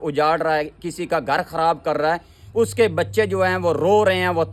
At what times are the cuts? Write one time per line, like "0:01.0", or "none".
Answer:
none